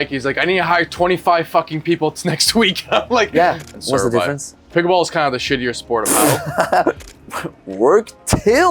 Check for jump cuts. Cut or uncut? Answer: cut